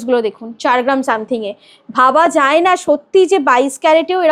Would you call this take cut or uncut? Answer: uncut